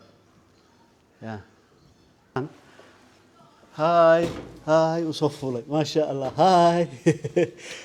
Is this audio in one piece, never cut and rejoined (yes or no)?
no